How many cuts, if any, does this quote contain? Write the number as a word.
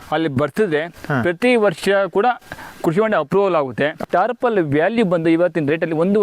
one